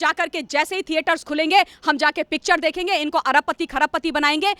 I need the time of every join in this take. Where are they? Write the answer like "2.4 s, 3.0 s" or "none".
none